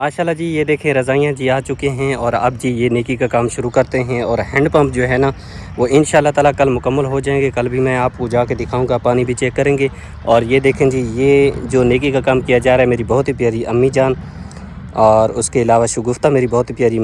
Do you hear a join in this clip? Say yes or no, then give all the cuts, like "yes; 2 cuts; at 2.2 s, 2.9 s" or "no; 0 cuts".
no; 0 cuts